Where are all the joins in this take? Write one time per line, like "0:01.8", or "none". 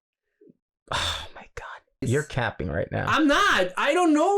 0:02.1